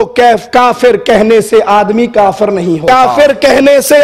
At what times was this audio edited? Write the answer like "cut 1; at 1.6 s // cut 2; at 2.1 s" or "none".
cut 1; at 2.8 s

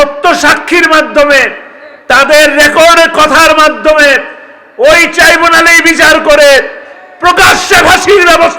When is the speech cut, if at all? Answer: none

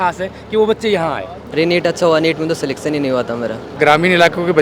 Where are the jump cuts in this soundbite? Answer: cut 1; at 1.4 s // cut 2; at 3.7 s

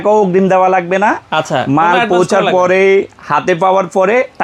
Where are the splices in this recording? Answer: none

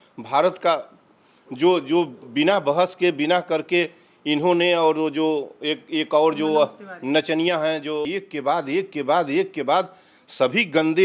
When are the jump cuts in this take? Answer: cut 1; at 8.0 s

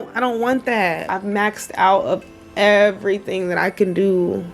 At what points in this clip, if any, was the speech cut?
cut 1; at 1.1 s

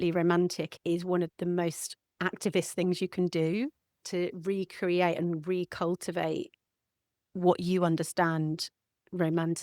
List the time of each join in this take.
cut 1; at 1.1 s // cut 2; at 4.0 s

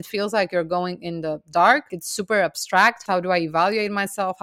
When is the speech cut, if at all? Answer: cut 1; at 2.0 s // cut 2; at 3.0 s

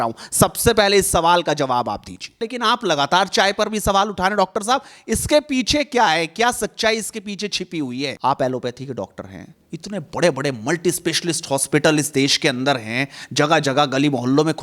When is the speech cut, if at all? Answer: cut 1; at 2.4 s // cut 2; at 8.2 s

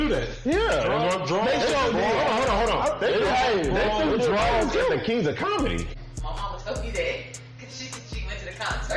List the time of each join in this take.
cut 1; at 5.9 s

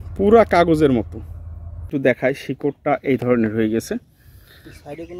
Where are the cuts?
cut 1; at 1.9 s

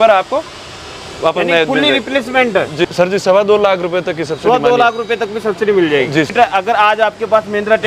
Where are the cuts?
cut 1; at 2.8 s // cut 2; at 6.3 s

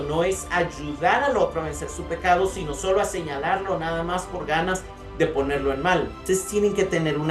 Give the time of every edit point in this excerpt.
cut 1; at 6.2 s

